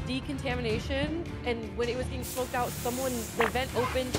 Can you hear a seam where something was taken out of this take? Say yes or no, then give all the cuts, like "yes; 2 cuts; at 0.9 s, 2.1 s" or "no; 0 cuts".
no; 0 cuts